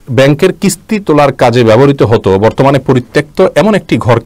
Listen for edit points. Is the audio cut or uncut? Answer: uncut